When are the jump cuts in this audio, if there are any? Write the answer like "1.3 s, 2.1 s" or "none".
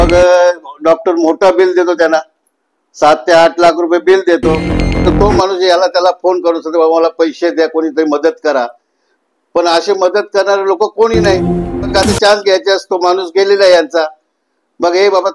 5.1 s, 11.9 s